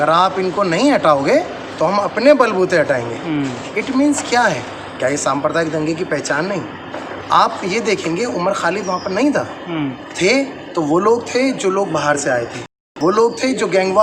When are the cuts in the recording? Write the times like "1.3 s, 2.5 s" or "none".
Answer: none